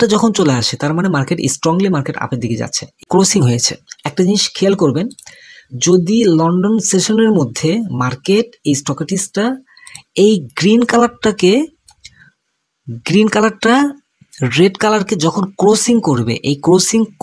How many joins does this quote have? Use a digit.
1